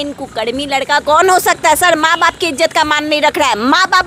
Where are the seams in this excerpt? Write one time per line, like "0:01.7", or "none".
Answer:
none